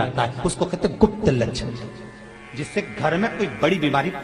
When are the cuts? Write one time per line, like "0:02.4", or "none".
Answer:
none